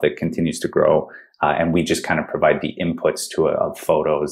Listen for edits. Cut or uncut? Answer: uncut